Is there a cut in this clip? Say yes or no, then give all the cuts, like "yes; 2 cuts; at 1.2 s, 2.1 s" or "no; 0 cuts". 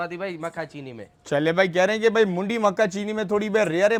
no; 0 cuts